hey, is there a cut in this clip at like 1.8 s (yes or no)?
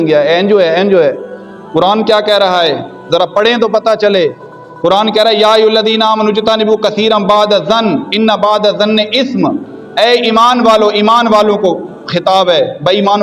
no